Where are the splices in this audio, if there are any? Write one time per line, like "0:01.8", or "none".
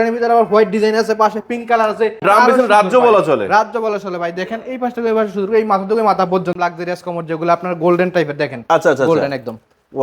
0:02.2
0:06.6